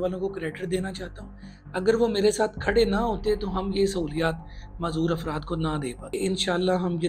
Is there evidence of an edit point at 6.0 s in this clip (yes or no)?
yes